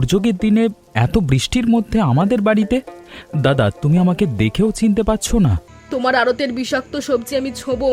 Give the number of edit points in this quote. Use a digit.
1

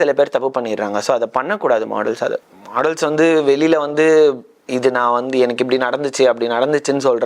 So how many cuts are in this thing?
1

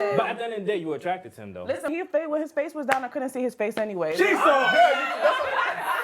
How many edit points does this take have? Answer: 1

